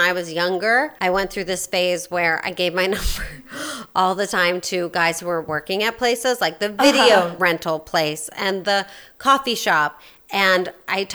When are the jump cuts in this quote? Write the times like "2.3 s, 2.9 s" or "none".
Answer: 0.9 s, 7.3 s